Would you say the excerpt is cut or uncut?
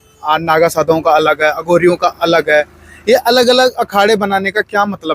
uncut